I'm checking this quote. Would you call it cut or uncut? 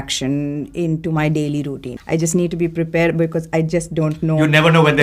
cut